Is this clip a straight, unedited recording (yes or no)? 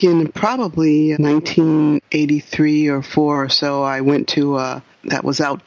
no